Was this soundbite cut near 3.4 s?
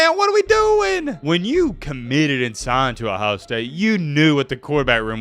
no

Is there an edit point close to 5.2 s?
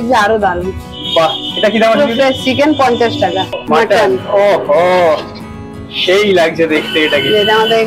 no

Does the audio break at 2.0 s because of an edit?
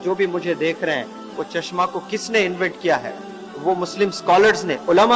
no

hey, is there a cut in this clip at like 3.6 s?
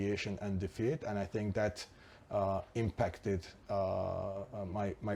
no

